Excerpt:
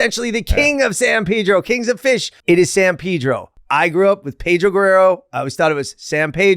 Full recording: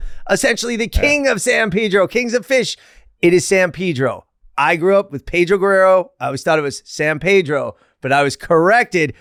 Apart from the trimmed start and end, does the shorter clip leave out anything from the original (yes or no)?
yes